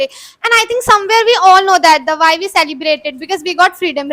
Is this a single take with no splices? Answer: yes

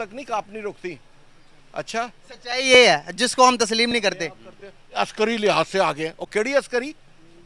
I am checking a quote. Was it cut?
no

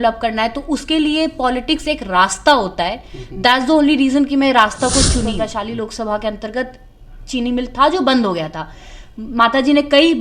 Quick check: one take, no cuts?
no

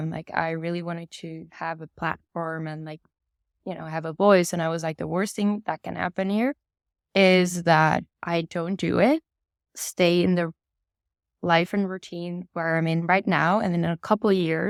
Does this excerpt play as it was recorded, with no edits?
yes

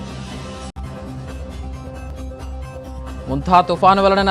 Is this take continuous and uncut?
no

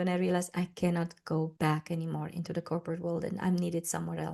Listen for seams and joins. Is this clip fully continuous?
no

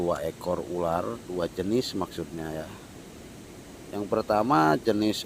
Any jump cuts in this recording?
no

